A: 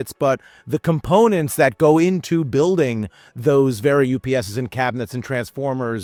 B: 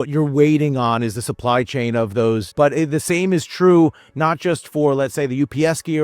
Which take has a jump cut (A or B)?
B